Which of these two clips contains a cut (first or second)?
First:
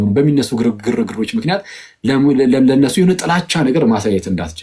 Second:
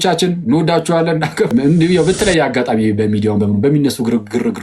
second